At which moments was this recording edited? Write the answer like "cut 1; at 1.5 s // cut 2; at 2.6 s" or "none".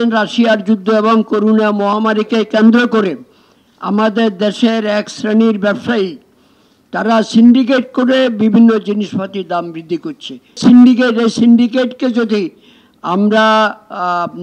cut 1; at 10.6 s